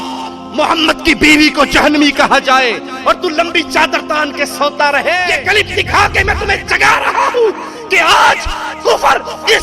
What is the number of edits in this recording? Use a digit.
1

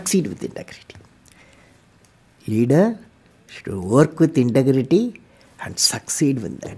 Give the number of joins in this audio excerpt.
0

